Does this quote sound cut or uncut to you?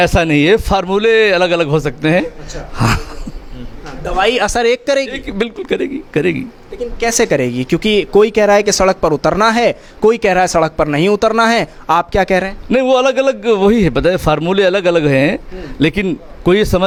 uncut